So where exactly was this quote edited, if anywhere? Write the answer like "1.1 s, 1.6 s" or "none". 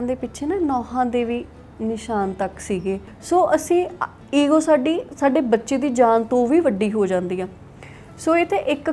3.1 s